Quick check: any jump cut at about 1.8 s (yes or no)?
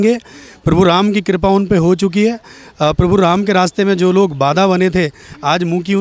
no